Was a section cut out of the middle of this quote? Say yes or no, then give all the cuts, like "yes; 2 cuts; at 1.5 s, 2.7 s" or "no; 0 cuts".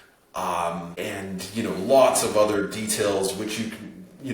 yes; 1 cut; at 0.9 s